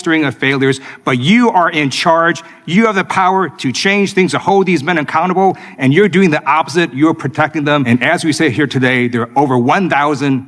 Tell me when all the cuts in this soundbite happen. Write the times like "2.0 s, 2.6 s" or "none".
7.8 s